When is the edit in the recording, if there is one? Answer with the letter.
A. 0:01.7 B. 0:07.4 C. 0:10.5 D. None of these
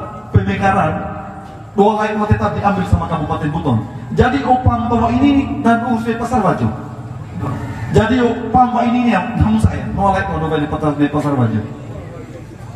B